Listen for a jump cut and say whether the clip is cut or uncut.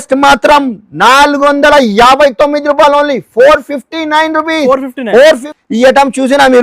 cut